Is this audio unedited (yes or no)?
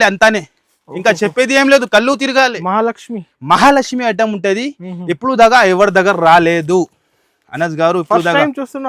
yes